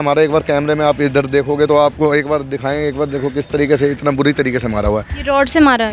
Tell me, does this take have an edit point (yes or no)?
no